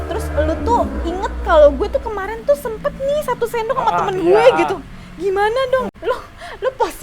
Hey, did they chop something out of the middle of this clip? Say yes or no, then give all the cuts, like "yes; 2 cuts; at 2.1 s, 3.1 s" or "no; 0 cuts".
yes; 1 cut; at 5.9 s